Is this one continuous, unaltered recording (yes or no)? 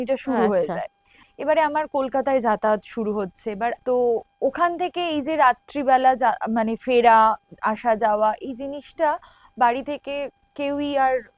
no